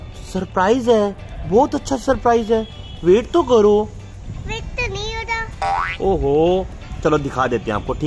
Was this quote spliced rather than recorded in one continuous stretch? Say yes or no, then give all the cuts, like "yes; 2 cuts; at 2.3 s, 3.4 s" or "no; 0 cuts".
yes; 1 cut; at 6.8 s